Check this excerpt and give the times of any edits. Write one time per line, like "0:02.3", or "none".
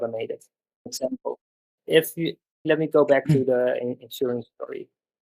0:00.9